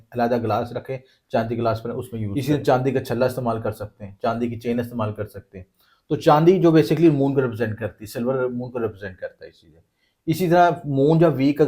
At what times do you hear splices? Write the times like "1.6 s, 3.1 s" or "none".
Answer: 2.3 s